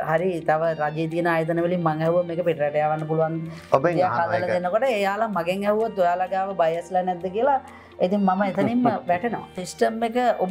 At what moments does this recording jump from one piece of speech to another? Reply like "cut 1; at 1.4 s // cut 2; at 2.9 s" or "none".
cut 1; at 9.6 s